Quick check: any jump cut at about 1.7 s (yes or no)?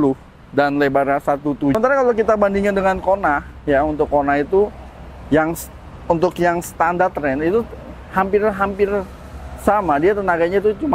yes